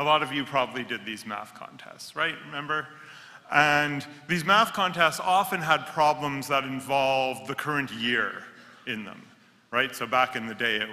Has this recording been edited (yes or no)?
yes